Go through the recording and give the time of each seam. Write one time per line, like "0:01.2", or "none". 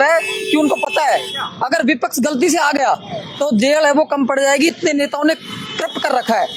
none